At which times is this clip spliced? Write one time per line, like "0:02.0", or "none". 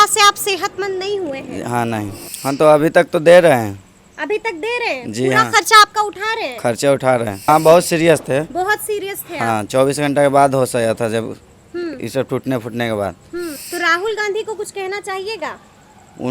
0:02.3
0:07.5
0:13.6

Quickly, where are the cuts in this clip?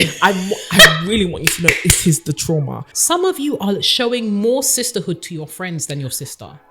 0:02.9

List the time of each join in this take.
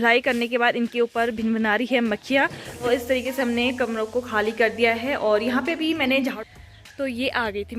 0:02.9
0:06.4

